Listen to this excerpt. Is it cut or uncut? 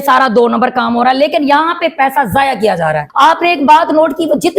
cut